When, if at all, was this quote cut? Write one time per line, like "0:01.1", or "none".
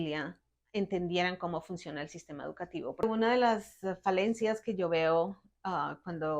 0:03.0